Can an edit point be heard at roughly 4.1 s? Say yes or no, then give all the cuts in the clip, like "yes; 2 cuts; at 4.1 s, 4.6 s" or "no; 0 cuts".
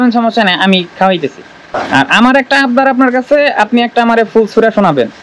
no; 1 cut; at 1.8 s